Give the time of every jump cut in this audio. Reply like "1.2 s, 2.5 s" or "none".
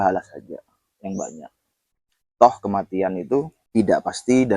3.6 s